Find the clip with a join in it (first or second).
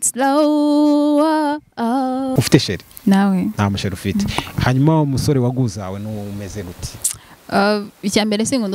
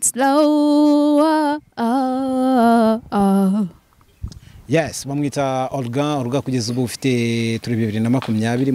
first